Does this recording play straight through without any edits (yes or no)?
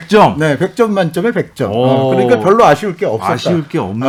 yes